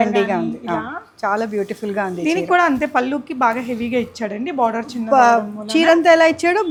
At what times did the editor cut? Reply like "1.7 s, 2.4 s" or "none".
none